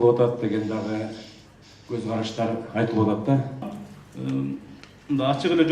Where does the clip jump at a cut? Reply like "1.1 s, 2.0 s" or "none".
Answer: 3.6 s